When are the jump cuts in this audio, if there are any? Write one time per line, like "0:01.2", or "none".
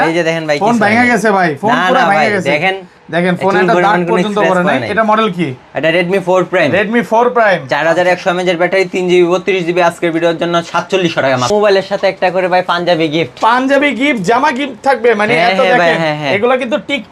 0:11.5